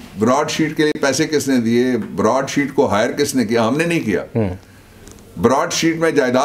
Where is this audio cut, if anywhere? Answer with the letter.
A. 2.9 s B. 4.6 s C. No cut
C